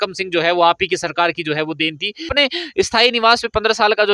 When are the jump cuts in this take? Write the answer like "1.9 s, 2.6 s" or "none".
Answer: 2.3 s